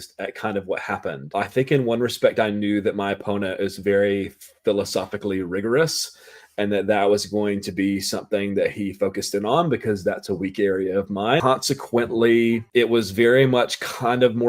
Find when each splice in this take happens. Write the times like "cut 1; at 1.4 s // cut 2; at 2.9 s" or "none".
cut 1; at 1.2 s // cut 2; at 11.4 s // cut 3; at 12.7 s